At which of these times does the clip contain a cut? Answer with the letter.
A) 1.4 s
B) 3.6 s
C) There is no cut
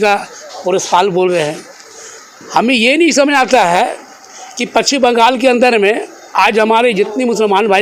C